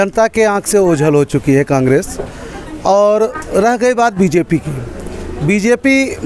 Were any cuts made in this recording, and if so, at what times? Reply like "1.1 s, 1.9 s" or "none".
none